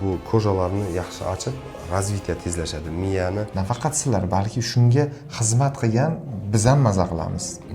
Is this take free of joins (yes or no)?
no